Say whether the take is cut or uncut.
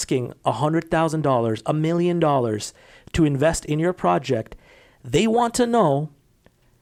uncut